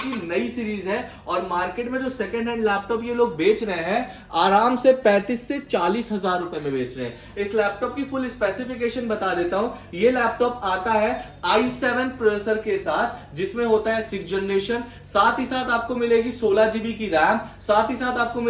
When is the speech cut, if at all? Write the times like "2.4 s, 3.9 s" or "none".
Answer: none